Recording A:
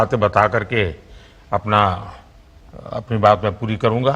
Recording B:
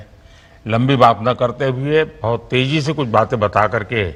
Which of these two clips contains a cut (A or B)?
A